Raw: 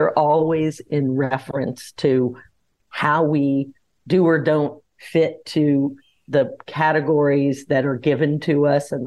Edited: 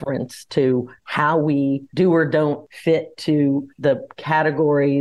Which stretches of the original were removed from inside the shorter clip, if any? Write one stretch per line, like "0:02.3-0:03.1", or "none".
0:02.5-0:02.9
0:03.7-0:04.0
0:04.8-0:05.0
0:06.0-0:06.2